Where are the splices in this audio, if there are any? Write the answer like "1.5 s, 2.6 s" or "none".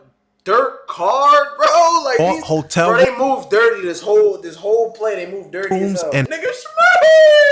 6.3 s